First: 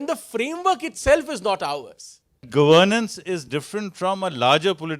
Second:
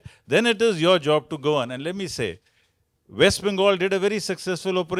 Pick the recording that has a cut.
first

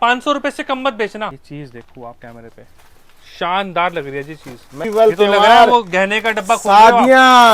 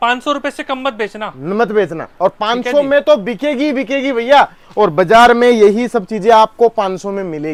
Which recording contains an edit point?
first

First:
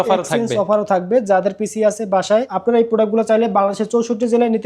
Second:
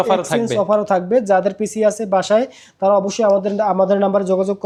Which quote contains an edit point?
first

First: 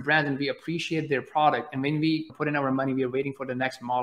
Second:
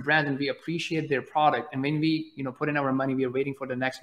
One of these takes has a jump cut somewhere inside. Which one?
first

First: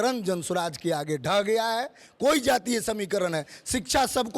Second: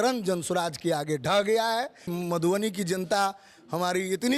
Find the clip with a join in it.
second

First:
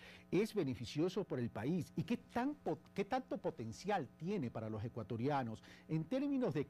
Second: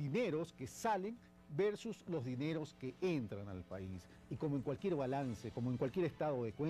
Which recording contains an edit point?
first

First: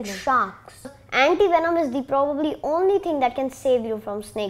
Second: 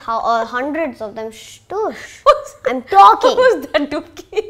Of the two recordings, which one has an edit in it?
first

